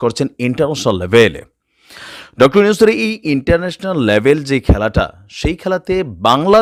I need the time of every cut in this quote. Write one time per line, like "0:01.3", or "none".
none

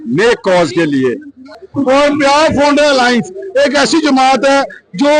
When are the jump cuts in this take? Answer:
0:01.6

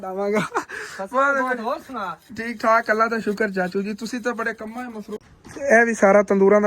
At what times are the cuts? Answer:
0:05.2

